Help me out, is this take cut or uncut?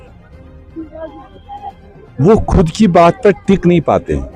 uncut